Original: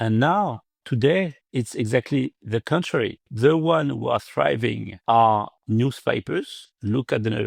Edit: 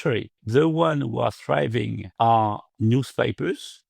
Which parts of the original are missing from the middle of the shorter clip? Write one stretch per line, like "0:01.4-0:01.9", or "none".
none